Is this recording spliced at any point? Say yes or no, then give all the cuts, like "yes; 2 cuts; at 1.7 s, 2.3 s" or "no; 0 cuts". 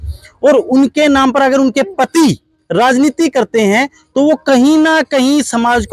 no; 0 cuts